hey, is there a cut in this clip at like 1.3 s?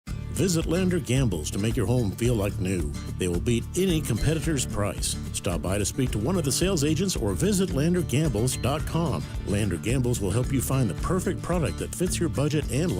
yes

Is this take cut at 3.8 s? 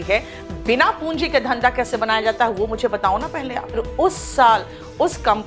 yes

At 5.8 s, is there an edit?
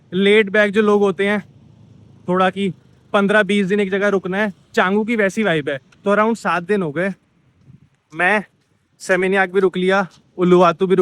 yes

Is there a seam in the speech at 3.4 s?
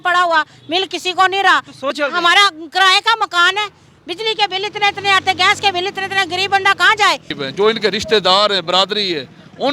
no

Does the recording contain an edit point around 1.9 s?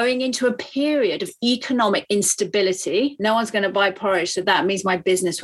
no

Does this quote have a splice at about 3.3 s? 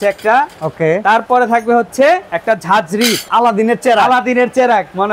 yes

